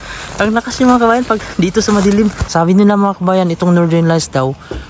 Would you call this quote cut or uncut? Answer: cut